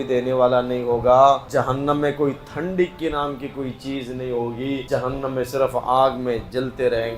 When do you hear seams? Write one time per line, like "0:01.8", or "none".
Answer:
0:01.4
0:04.8